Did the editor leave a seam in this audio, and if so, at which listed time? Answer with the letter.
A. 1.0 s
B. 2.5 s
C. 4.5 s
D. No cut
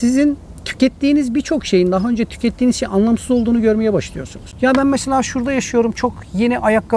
D